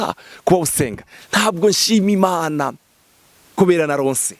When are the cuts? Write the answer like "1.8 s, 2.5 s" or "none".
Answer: 1.1 s